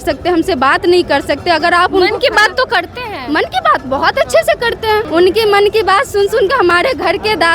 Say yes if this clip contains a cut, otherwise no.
yes